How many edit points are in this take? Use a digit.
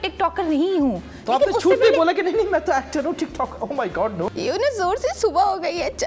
1